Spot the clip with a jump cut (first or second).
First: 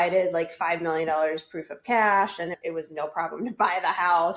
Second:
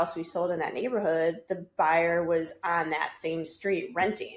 first